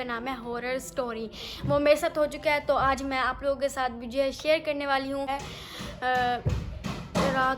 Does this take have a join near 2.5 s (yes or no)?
no